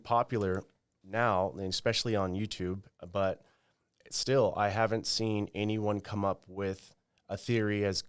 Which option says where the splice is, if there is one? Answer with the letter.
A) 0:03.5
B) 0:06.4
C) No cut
C